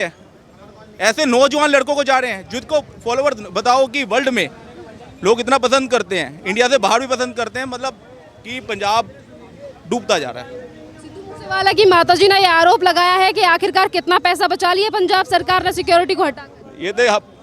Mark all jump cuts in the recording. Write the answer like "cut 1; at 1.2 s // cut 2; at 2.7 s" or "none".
none